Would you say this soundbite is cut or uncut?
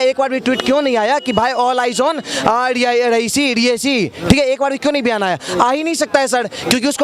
uncut